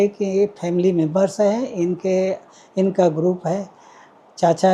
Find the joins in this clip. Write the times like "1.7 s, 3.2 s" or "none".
none